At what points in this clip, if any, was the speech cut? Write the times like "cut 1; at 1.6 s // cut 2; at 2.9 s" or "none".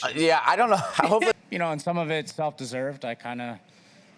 cut 1; at 1.4 s